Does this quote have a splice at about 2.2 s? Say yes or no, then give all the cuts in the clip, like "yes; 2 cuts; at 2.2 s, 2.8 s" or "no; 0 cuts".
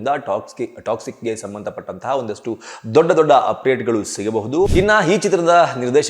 no; 1 cut; at 4.7 s